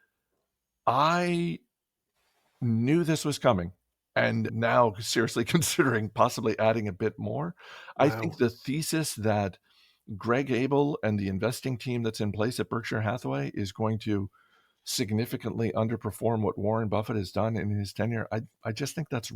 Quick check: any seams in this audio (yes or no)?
yes